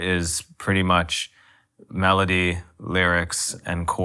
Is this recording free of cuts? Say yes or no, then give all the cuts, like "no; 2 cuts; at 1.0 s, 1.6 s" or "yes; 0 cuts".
yes; 0 cuts